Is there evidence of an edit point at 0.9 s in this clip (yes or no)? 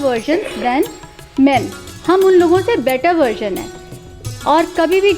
no